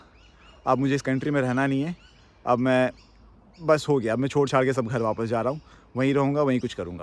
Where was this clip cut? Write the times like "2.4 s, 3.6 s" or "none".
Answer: none